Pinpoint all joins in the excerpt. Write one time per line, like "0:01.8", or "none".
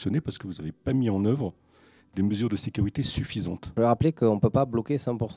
0:03.7